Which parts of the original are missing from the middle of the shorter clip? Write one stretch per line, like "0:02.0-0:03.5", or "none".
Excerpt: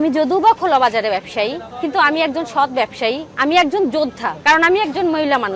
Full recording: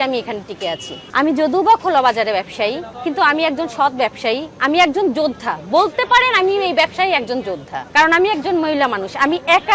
0:05.5-0:07.8

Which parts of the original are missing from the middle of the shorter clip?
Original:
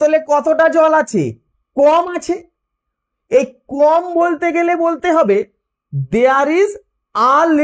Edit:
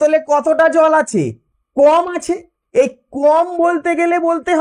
0:02.5-0:03.1

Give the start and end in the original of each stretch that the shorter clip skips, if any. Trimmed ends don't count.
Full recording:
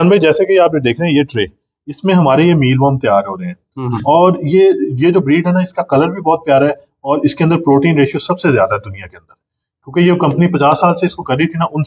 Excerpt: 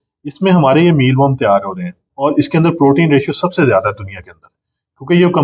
0:03.7-0:06.9

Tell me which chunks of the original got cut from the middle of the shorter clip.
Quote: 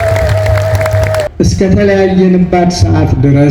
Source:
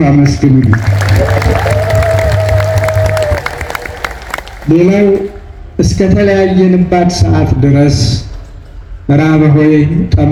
0:03.3-0:05.7

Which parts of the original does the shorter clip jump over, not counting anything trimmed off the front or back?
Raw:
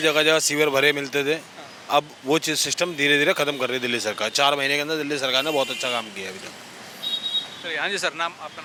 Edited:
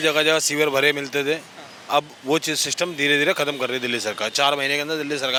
none

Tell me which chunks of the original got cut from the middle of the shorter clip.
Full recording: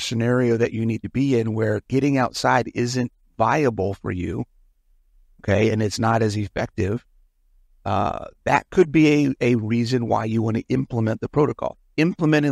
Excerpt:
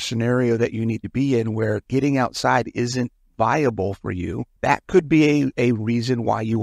0:04.5-0:08.3

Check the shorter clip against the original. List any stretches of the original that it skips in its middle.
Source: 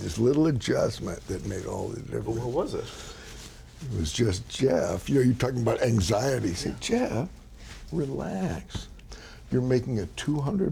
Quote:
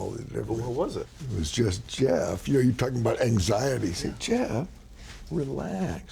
0:03.0-0:03.8

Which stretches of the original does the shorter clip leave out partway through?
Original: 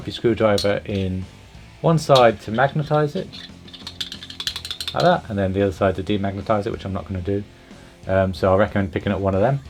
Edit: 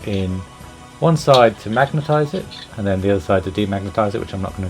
0:03.6-0:05.3

